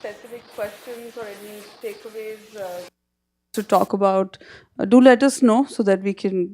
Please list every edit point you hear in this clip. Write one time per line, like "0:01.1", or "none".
0:01.4